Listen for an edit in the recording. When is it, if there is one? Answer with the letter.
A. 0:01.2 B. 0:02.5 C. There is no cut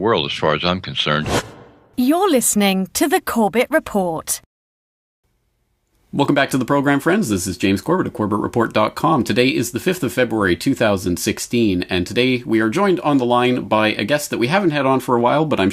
A